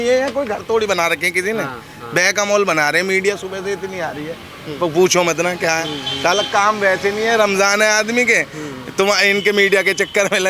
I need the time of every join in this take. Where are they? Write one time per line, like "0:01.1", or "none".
none